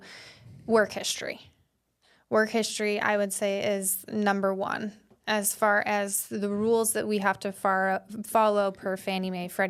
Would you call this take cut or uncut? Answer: uncut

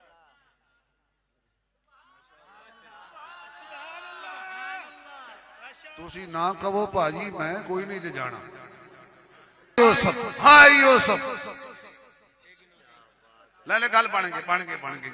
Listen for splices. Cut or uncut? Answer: cut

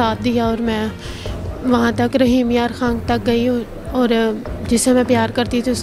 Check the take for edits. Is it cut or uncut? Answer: uncut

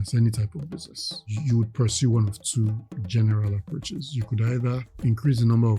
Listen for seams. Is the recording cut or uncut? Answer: cut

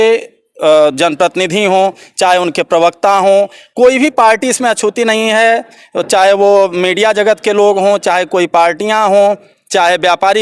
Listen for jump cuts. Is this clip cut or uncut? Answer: uncut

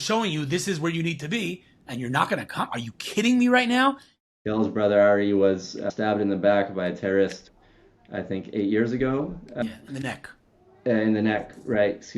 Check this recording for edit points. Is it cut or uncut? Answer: cut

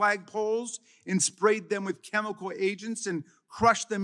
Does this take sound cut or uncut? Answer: uncut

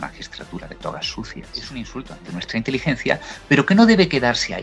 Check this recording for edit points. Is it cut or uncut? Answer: cut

